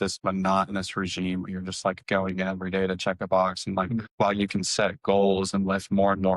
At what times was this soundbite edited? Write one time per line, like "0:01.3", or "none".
none